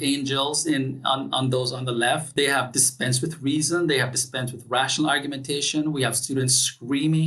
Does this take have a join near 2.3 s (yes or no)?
yes